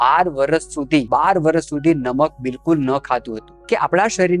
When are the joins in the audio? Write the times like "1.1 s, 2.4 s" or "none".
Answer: 1.1 s, 3.4 s